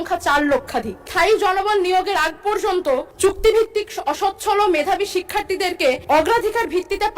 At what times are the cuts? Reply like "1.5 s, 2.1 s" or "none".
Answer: 1.1 s, 3.1 s, 6.0 s